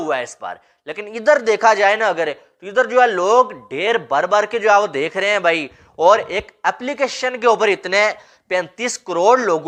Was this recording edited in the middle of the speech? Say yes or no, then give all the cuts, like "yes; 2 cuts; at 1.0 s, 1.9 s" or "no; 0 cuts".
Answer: no; 0 cuts